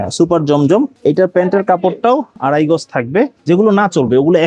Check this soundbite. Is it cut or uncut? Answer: cut